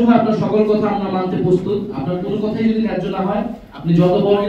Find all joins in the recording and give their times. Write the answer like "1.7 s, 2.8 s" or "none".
none